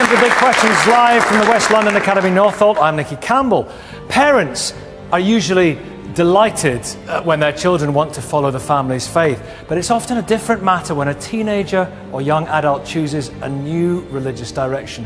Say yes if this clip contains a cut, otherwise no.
no